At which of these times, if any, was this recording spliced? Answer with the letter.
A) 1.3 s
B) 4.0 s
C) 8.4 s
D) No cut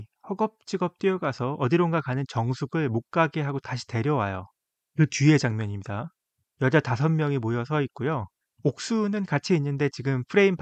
C